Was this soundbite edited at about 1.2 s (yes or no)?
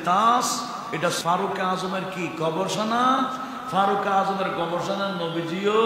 yes